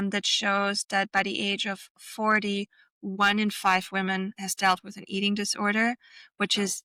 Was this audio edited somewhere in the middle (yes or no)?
no